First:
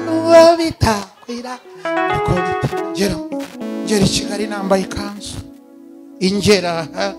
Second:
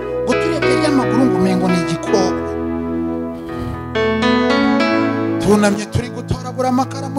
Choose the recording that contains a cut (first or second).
first